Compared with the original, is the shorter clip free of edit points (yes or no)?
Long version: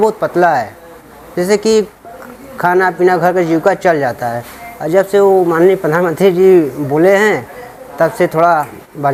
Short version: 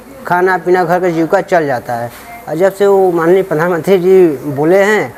yes